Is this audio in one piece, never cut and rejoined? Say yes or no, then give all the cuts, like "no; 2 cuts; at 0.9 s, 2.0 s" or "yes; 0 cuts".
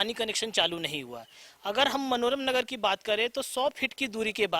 yes; 0 cuts